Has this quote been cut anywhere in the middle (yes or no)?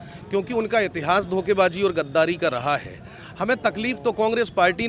no